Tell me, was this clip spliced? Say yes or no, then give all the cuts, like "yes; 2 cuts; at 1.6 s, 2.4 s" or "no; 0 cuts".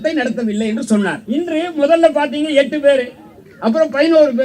yes; 1 cut; at 1.2 s